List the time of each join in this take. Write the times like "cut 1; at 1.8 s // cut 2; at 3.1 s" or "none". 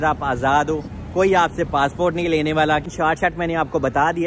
cut 1; at 2.9 s